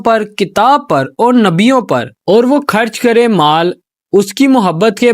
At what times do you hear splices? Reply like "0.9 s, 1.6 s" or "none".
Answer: 2.1 s